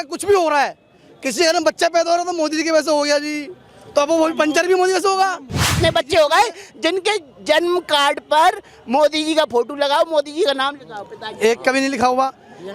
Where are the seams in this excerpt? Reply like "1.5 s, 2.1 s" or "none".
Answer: 5.7 s